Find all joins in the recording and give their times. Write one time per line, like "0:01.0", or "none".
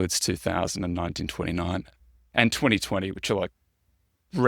0:02.0